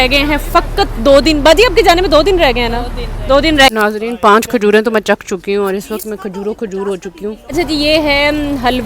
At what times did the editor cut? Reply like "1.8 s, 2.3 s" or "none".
3.7 s, 7.5 s